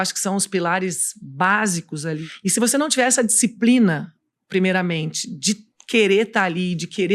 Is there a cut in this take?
yes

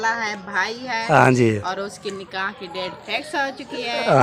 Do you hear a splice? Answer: no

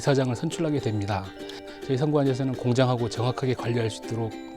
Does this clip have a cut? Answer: yes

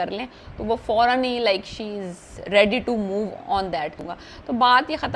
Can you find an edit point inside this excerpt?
yes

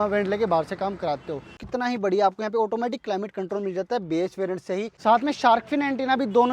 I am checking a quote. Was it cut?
yes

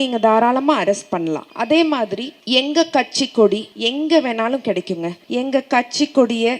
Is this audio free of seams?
no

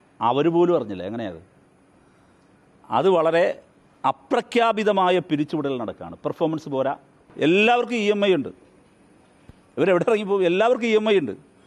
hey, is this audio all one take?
no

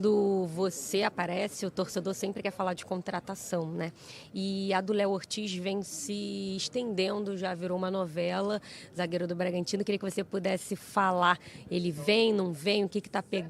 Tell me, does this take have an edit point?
no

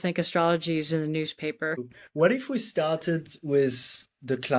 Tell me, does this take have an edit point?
yes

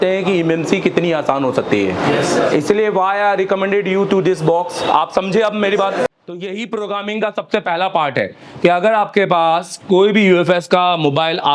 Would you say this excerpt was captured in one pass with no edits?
no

